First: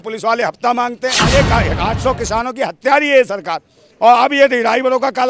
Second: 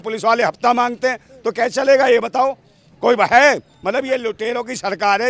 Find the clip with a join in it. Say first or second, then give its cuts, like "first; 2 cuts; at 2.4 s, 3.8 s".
first; 1 cut; at 1.2 s